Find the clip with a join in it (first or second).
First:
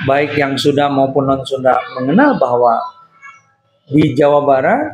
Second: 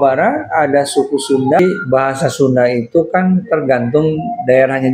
second